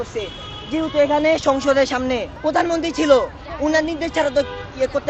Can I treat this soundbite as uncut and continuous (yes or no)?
no